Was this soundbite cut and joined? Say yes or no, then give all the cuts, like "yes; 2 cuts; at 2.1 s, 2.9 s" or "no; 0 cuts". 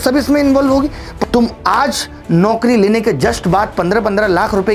yes; 1 cut; at 1.1 s